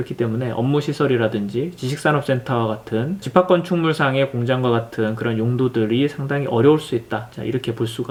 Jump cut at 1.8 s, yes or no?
no